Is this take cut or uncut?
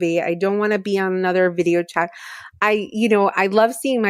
uncut